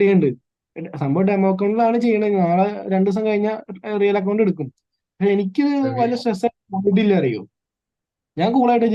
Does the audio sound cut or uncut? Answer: uncut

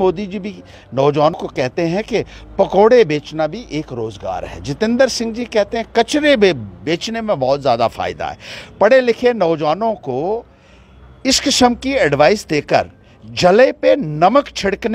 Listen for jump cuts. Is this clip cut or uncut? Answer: cut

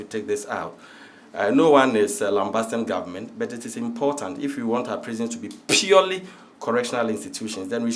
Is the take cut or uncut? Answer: uncut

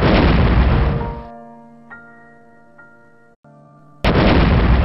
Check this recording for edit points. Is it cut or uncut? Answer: uncut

